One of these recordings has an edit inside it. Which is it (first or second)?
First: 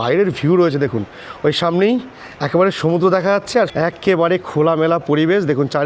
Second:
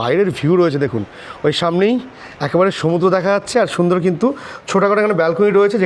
first